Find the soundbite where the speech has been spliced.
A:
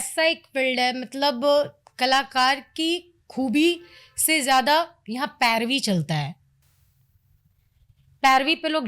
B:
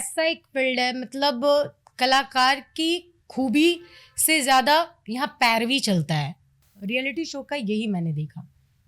B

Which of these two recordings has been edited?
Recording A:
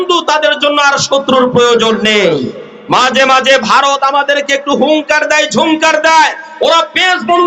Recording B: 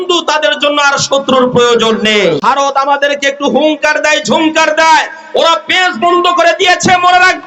B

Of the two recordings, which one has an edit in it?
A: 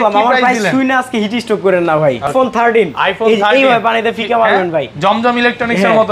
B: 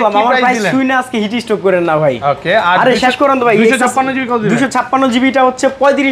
A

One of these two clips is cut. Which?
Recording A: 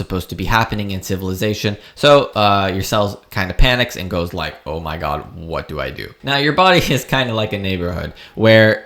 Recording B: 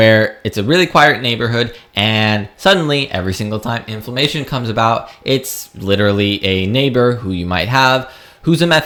A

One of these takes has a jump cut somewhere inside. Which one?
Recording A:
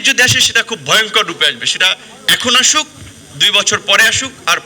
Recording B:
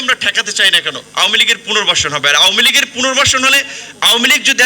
B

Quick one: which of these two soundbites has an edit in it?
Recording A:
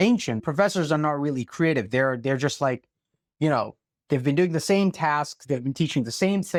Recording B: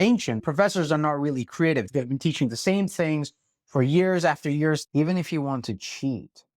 B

